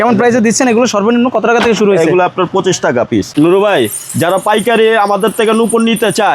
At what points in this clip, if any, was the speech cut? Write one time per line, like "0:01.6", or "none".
0:03.4

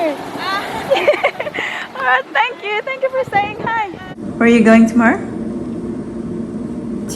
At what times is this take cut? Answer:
0:04.3

